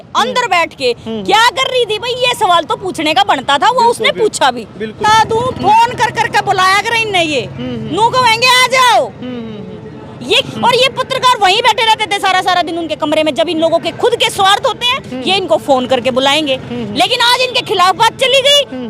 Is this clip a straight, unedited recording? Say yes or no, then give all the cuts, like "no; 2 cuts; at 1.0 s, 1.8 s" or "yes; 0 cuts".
no; 2 cuts; at 5.0 s, 10.5 s